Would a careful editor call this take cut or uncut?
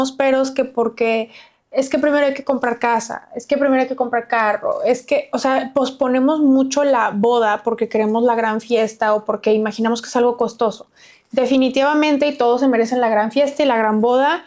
uncut